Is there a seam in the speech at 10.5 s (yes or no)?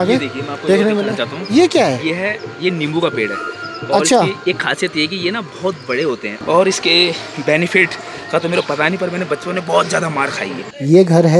yes